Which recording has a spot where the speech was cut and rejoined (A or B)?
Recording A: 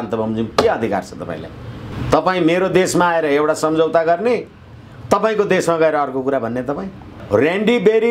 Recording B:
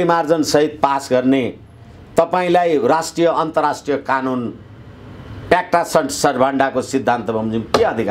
A